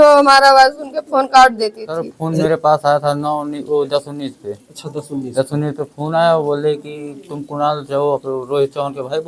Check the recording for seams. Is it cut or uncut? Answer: cut